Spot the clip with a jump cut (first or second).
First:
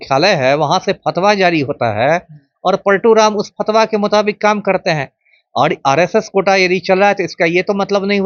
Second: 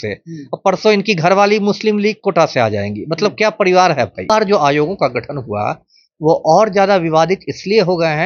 second